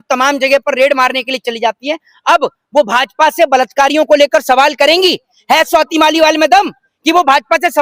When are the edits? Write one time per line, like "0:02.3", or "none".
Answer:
none